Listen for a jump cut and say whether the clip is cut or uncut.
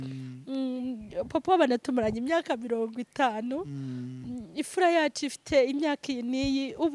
uncut